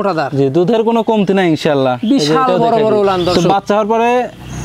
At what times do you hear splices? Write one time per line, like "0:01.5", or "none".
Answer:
0:03.3